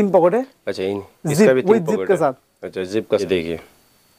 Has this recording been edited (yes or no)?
yes